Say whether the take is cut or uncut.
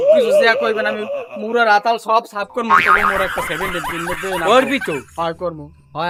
uncut